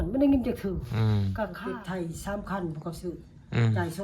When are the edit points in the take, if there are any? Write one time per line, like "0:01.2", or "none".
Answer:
0:01.6